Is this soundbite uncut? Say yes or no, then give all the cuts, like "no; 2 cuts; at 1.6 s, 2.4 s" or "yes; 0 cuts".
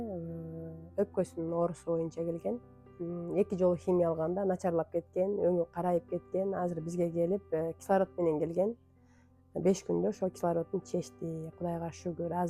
yes; 0 cuts